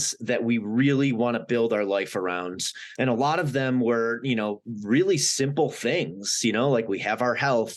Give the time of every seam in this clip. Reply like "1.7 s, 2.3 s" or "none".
2.8 s